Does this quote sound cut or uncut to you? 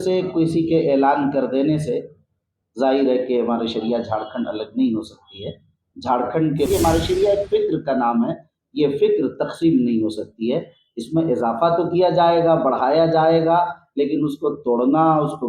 cut